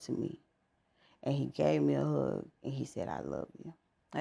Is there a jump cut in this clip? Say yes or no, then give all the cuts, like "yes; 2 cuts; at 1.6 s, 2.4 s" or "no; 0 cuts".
no; 0 cuts